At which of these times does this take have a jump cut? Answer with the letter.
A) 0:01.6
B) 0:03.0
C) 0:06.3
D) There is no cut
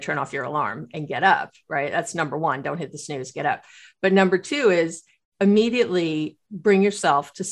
D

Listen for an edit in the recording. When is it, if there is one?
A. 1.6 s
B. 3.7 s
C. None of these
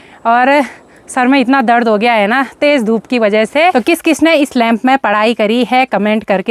B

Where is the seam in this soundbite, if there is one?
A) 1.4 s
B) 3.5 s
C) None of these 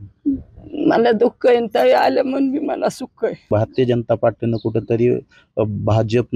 B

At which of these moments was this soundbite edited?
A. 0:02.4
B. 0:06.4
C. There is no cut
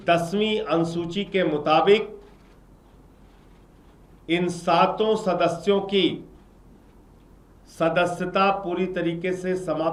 C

